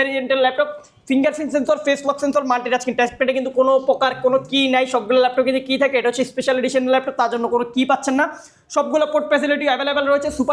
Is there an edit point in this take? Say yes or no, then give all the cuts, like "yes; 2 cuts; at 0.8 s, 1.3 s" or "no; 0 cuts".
no; 0 cuts